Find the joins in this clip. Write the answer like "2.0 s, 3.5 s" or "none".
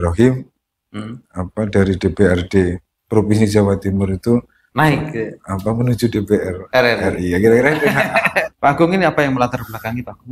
8.5 s

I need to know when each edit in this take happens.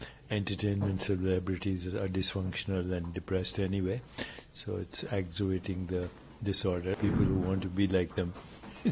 7.0 s

